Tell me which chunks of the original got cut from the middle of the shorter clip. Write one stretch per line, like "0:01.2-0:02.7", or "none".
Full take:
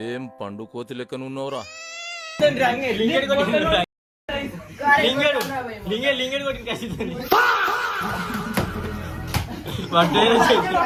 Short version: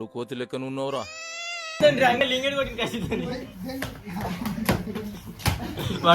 0:02.8-0:06.1